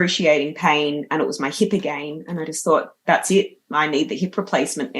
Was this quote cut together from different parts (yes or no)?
no